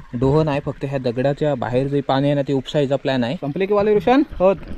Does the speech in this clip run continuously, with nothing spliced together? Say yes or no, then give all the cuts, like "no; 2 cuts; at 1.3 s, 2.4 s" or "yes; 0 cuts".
no; 1 cut; at 3.4 s